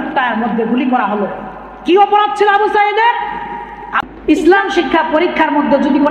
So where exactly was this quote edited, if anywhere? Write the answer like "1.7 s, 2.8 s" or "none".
3.9 s